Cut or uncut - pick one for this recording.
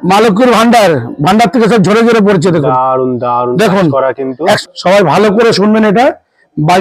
cut